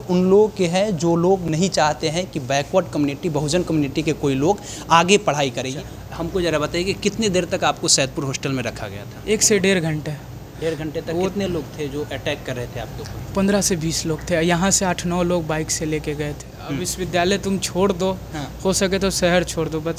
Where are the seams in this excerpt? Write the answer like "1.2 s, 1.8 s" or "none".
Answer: 5.6 s, 16.5 s